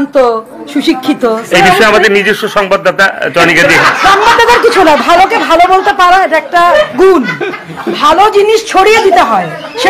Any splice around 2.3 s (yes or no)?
no